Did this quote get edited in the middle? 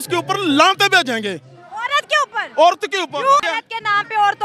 yes; 1 cut; at 3.6 s

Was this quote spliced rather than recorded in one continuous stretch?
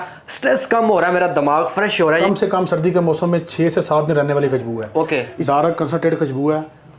yes; 2 cuts; at 2.2 s, 5.3 s

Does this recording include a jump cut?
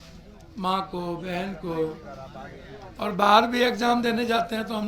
no; 0 cuts

